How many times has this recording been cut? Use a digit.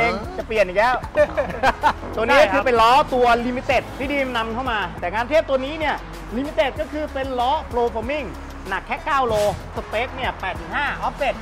4